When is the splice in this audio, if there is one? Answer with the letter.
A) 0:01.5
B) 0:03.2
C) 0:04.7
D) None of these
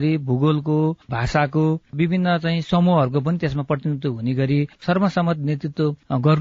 C